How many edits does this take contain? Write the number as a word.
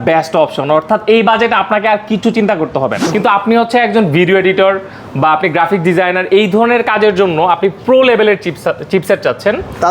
one